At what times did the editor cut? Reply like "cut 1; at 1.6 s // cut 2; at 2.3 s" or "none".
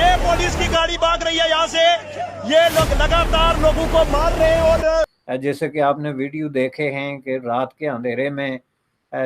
cut 1; at 5.2 s